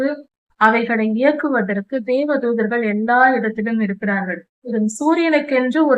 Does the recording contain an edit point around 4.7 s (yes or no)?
yes